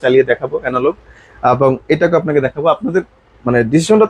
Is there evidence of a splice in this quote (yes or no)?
no